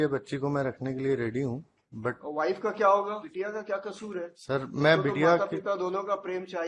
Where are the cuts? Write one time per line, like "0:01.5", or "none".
0:03.3
0:04.4